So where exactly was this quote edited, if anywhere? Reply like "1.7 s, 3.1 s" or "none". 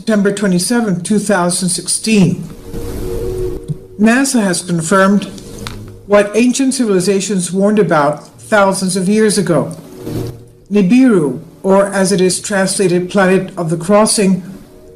3.4 s